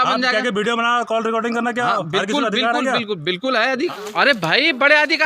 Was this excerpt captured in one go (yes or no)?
no